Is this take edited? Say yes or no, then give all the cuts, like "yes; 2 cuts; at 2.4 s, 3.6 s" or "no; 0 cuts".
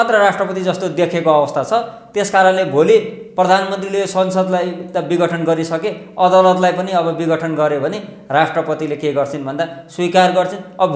no; 0 cuts